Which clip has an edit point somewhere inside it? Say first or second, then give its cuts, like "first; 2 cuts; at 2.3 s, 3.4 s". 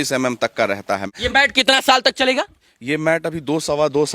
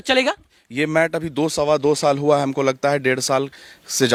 first; 1 cut; at 1.1 s